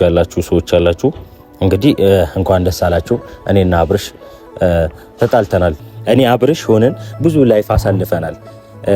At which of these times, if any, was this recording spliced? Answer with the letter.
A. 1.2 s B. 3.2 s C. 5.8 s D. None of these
C